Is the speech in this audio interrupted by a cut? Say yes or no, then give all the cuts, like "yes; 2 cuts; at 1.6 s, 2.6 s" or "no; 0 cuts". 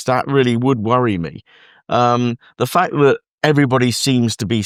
no; 0 cuts